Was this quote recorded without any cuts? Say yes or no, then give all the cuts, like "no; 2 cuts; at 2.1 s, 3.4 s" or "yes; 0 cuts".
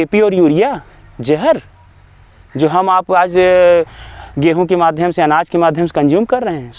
yes; 0 cuts